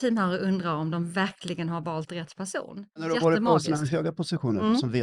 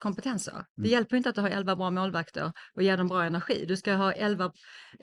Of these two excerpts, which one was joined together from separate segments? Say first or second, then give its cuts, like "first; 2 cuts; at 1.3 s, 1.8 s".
first; 1 cut; at 3.1 s